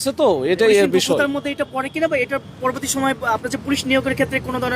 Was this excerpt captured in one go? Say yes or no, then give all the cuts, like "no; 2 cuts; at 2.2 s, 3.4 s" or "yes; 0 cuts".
yes; 0 cuts